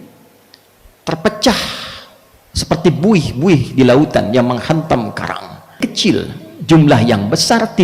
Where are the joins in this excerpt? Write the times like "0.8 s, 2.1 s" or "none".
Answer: 5.8 s